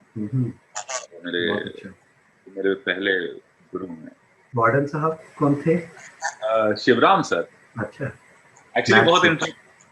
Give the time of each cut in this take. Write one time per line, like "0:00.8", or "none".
0:04.4